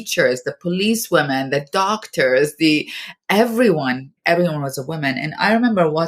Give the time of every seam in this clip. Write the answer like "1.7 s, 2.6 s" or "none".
4.2 s